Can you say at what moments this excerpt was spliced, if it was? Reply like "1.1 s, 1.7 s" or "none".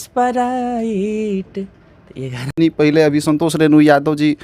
2.5 s